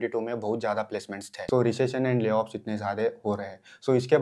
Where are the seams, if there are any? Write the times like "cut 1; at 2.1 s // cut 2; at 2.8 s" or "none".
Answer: cut 1; at 1.2 s